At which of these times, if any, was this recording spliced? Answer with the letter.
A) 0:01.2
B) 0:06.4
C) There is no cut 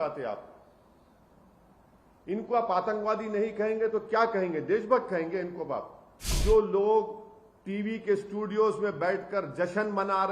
B